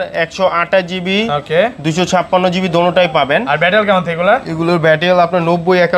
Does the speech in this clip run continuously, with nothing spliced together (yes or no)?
yes